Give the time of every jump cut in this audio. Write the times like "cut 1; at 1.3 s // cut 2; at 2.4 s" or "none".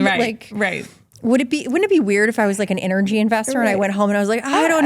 none